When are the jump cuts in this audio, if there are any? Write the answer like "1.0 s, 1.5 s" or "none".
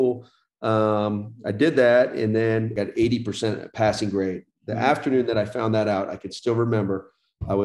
2.7 s